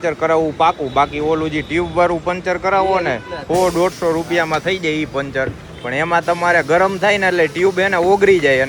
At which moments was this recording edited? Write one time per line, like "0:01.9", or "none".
none